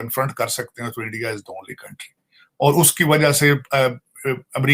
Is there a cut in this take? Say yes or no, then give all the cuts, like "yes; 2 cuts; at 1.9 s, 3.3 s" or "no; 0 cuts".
no; 0 cuts